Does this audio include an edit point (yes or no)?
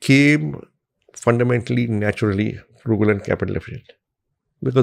no